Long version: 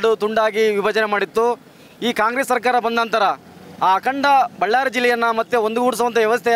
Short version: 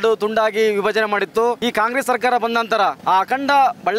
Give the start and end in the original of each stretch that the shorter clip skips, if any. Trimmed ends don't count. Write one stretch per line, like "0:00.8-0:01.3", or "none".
0:01.6-0:02.0
0:03.4-0:03.7

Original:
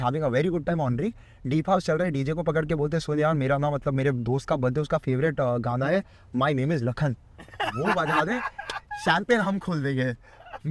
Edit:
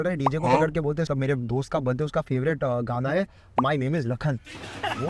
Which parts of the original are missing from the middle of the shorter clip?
0:03.0-0:03.8

